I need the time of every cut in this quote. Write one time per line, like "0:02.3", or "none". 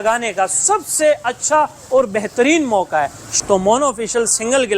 0:03.2